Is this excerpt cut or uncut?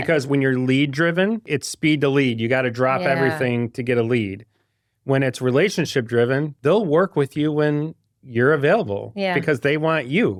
uncut